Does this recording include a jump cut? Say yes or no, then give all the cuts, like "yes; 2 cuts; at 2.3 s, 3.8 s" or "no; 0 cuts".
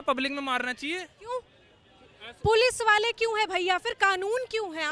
no; 0 cuts